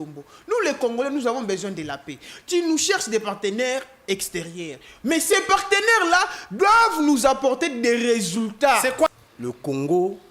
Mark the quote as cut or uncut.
cut